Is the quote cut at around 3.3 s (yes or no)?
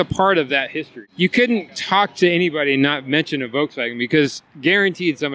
no